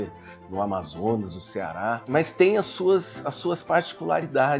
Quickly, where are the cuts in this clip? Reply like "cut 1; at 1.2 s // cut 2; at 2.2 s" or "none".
cut 1; at 2.0 s